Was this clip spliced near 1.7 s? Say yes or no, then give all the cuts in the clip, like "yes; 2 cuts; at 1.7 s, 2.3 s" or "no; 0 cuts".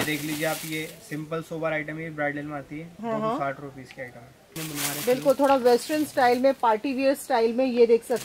no; 1 cut; at 4.5 s